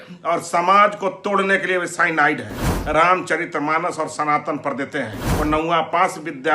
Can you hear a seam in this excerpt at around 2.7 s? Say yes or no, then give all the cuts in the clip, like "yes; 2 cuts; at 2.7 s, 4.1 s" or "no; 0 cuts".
yes; 2 cuts; at 2.7 s, 5.2 s